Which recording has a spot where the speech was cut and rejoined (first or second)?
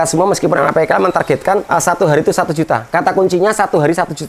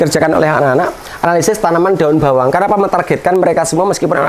first